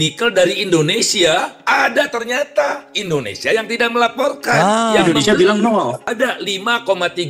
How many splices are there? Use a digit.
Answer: 1